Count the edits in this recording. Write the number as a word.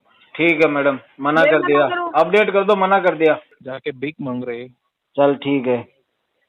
one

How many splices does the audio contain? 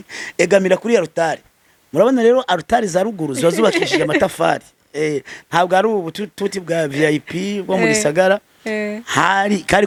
zero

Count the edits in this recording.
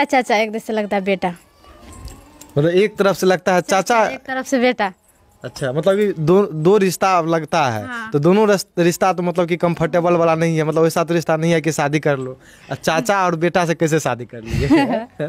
zero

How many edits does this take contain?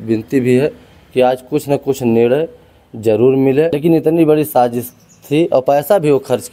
one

